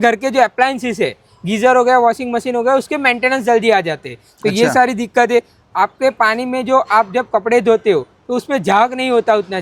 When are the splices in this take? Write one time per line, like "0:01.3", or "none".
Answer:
none